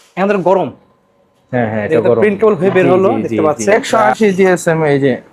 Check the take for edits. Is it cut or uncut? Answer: cut